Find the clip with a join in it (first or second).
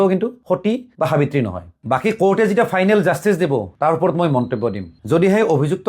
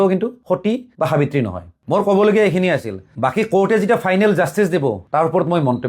first